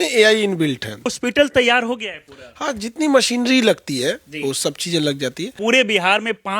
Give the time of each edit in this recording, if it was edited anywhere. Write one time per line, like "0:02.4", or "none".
0:01.1
0:05.6